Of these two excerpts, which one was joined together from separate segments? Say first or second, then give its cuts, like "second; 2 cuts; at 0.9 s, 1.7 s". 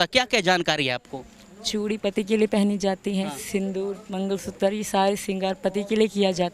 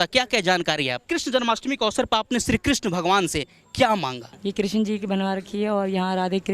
second; 2 cuts; at 1.0 s, 4.3 s